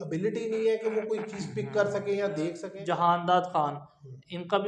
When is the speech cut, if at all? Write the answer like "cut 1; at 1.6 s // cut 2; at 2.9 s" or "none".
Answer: cut 1; at 2.7 s